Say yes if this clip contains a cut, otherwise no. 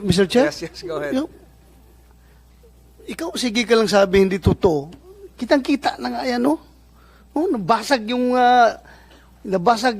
no